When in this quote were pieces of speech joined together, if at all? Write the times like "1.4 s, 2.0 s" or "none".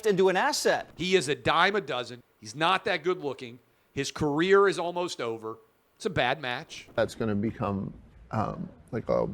0.9 s, 7.0 s